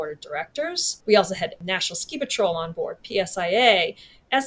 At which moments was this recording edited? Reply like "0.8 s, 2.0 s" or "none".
0.9 s, 1.6 s